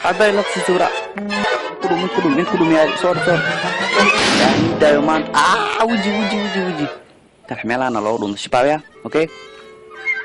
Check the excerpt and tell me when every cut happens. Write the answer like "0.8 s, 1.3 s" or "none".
none